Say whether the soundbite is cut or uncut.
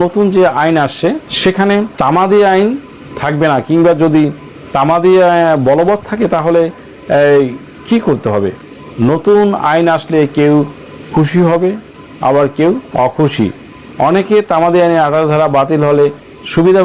cut